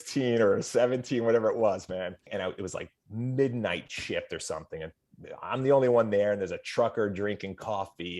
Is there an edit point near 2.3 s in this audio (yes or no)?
yes